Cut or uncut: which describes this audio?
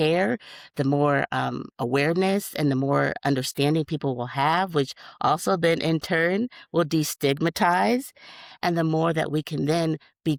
uncut